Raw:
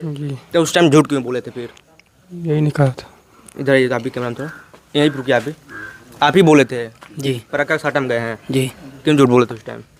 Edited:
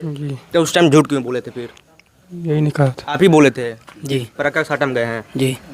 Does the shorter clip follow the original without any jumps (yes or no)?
no